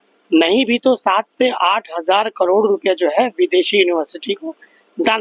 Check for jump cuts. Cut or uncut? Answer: uncut